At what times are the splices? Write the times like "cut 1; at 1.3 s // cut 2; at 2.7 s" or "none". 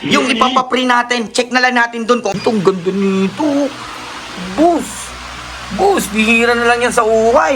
cut 1; at 2.3 s